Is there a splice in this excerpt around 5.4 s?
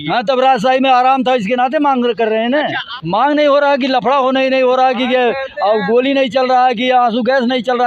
no; 1 cut; at 2.9 s

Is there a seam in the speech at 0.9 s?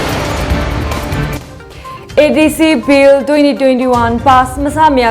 yes; 1 cut; at 0.9 s

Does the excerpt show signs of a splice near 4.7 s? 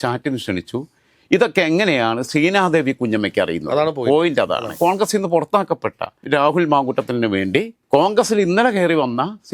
yes; 1 cut; at 4.7 s

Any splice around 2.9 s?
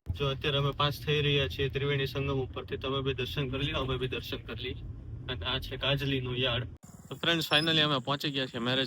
no; 1 cut; at 6.7 s

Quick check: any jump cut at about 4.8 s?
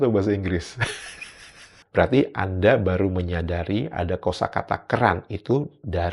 no; 1 cut; at 1.7 s

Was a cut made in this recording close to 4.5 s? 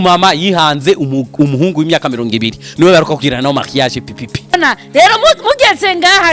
yes; 1 cut; at 4.5 s

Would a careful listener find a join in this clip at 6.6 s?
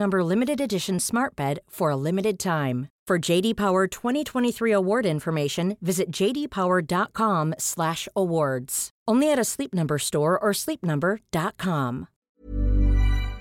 no; 1 cut; at 12.1 s

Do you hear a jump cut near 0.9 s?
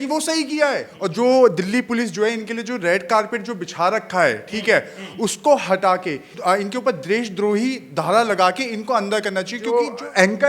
yes; 3 cuts; at 0.9 s, 6.3 s, 9.6 s

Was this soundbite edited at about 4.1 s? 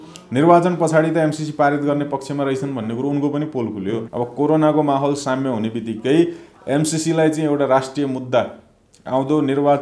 yes; 1 cut; at 4.1 s

